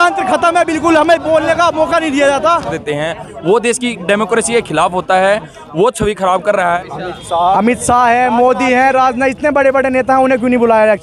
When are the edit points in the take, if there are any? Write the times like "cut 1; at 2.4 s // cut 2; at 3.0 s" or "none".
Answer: cut 1; at 2.8 s // cut 2; at 6.8 s